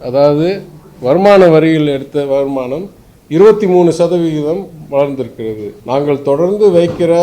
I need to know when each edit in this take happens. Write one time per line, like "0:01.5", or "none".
0:05.7